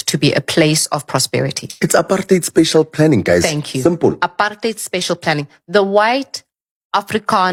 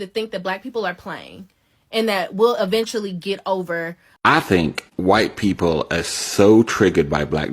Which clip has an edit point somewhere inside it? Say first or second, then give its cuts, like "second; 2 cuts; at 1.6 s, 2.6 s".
second; 1 cut; at 4.1 s